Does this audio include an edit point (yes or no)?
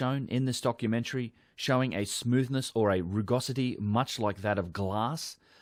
no